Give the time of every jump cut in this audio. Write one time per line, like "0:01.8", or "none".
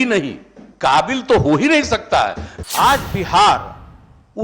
0:02.5

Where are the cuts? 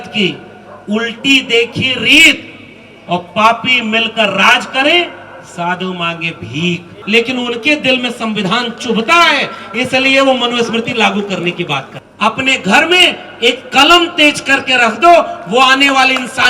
0:07.0
0:12.0

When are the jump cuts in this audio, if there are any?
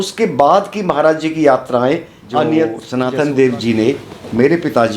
0:02.8

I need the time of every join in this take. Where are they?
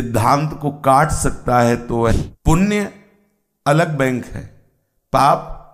0:02.2

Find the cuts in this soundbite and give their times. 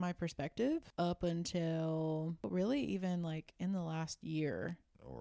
0:00.9
0:02.5

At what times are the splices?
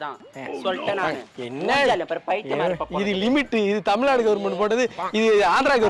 none

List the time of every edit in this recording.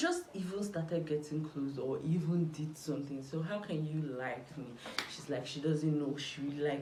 none

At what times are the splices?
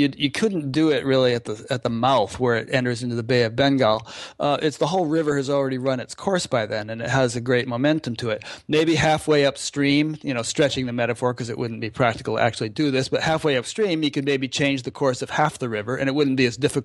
none

